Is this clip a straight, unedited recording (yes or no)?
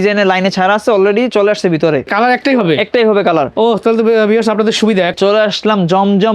no